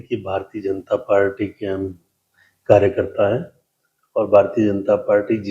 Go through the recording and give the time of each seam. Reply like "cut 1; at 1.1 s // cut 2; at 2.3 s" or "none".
none